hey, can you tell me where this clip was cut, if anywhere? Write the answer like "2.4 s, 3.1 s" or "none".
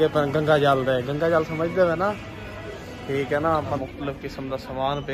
3.8 s